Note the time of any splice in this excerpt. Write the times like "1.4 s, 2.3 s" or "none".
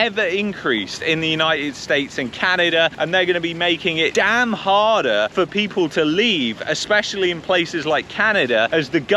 4.1 s